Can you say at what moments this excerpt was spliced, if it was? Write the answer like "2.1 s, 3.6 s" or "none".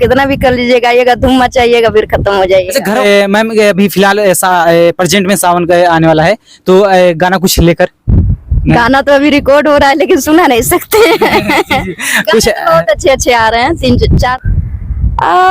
3.0 s, 14.3 s